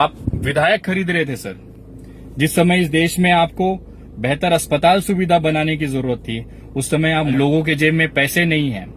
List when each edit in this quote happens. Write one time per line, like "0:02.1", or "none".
0:07.3